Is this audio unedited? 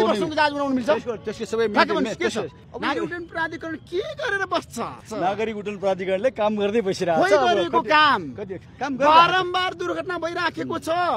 no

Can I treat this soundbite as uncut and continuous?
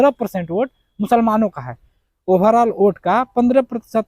yes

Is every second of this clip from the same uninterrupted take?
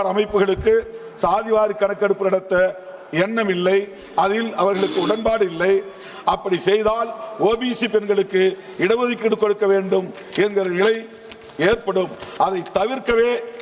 yes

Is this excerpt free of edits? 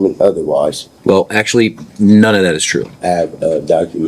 no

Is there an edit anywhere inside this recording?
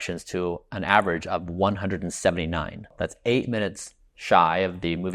yes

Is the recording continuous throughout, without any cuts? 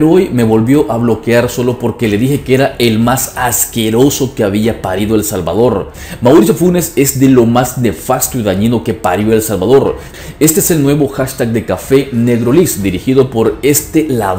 no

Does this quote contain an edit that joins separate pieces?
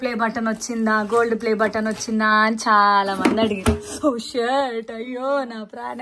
no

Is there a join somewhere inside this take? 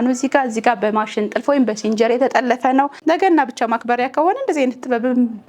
yes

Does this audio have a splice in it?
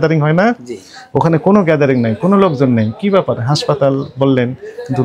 no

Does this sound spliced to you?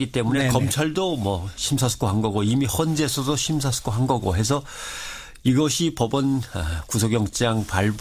no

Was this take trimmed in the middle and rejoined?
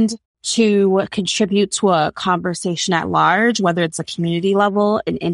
no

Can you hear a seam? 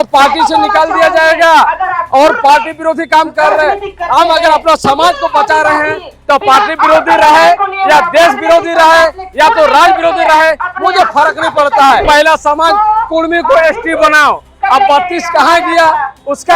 yes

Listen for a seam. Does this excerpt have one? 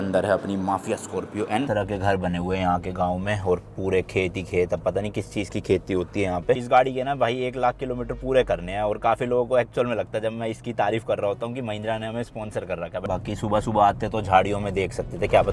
yes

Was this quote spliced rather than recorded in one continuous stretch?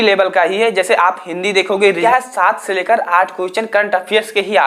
yes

